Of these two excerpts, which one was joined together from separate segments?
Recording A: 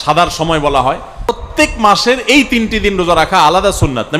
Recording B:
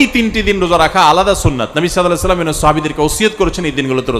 A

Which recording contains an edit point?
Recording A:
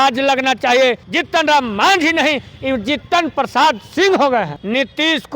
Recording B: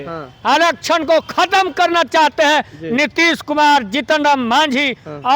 A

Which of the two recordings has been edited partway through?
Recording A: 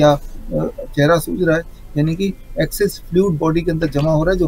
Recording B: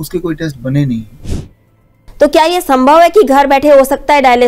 B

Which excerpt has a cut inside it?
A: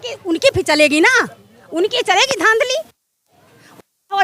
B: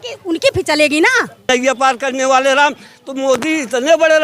B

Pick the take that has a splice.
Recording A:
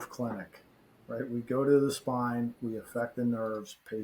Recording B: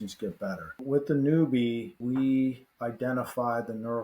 B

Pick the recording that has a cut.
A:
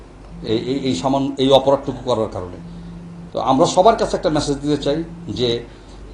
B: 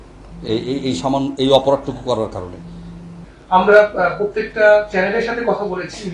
B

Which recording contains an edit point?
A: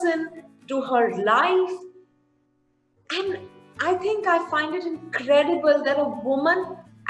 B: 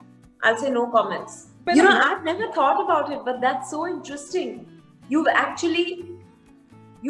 B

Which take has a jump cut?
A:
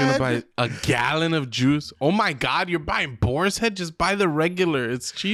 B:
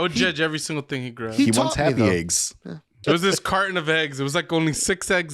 B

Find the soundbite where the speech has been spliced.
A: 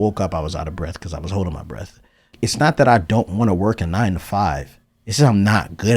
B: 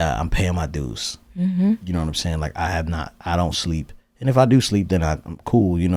A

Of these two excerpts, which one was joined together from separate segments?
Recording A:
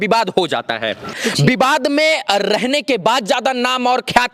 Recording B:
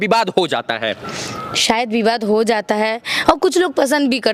A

